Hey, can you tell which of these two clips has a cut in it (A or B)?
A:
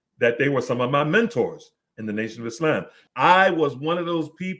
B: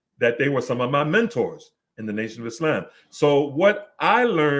A